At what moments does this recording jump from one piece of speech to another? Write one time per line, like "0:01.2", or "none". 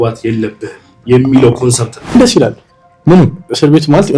0:02.2